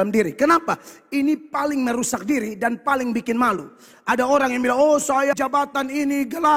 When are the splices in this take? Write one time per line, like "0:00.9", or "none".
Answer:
0:05.3